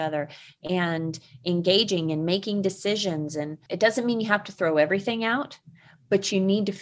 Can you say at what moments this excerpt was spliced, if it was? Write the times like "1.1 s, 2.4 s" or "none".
3.6 s